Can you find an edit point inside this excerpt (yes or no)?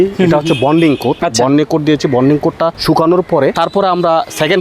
yes